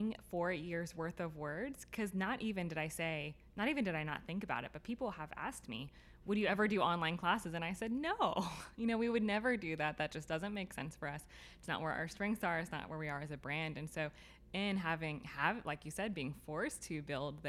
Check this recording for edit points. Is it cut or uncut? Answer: uncut